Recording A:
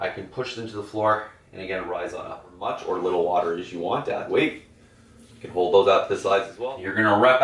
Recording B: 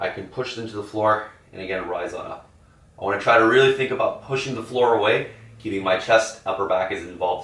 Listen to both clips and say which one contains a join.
A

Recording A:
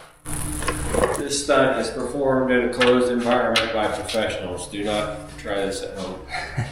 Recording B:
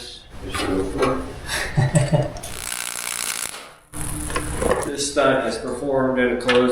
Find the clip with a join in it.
B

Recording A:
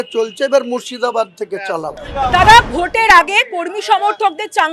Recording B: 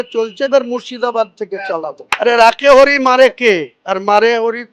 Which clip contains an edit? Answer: B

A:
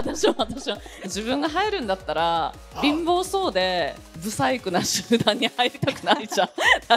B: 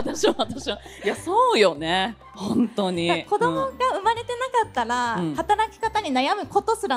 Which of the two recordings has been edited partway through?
A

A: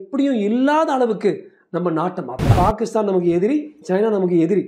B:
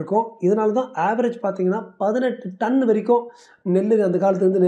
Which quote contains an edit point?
A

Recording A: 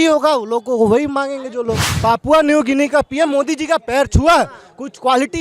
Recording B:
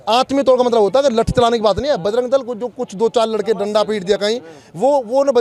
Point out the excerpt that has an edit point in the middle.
A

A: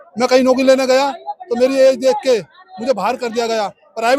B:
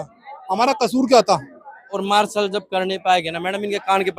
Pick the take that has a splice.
B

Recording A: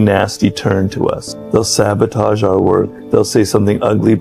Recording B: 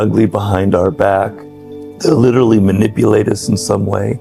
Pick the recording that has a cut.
A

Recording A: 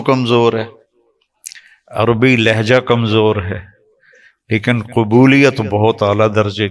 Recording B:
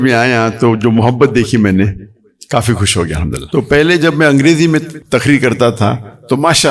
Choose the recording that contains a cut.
B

